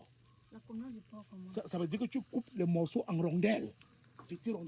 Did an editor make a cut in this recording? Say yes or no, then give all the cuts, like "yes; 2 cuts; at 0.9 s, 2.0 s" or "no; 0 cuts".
no; 0 cuts